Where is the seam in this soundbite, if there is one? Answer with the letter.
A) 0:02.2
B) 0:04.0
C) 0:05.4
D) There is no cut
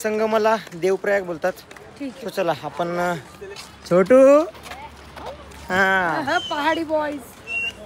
D